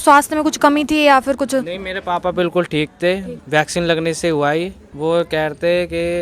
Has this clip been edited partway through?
yes; 2 cuts; at 3.3 s, 4.9 s

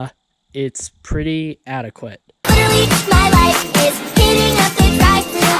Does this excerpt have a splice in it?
yes; 1 cut; at 2.3 s

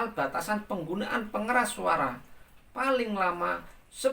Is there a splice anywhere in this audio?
no; 0 cuts

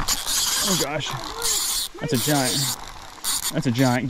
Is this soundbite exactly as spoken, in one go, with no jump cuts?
yes; 0 cuts

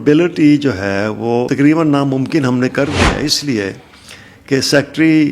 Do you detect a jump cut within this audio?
yes; 1 cut; at 1.5 s

